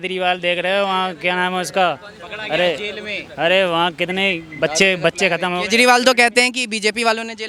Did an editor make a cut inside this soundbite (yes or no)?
no